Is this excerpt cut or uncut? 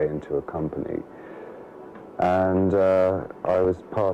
cut